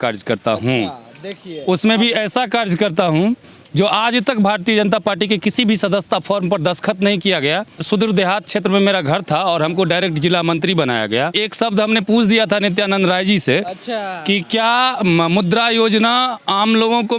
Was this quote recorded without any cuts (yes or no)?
no